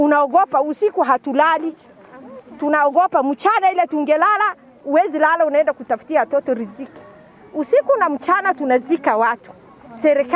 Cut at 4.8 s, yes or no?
no